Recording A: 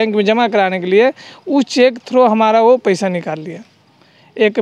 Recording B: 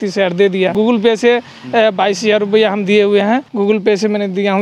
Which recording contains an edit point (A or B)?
B